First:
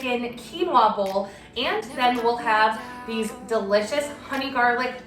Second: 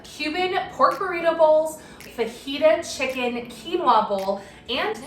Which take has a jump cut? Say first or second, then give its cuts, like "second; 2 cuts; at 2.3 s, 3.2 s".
second; 1 cut; at 2.0 s